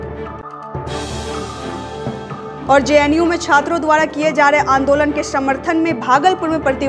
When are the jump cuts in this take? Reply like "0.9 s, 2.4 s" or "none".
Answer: 2.3 s